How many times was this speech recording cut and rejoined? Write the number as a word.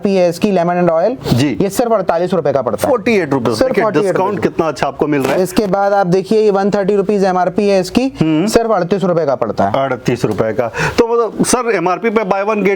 zero